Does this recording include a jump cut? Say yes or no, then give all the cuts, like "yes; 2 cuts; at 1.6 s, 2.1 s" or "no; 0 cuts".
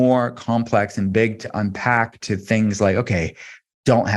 no; 0 cuts